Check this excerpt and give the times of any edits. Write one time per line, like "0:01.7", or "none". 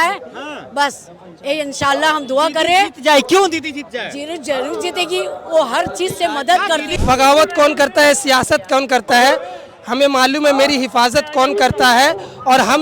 0:06.9